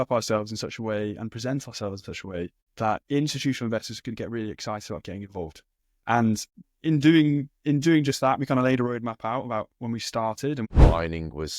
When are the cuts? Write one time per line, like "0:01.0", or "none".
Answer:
0:03.0
0:06.7
0:10.7